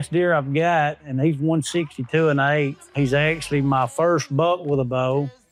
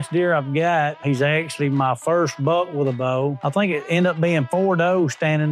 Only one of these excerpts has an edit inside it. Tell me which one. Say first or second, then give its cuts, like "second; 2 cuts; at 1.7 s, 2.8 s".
second; 2 cuts; at 1.0 s, 3.4 s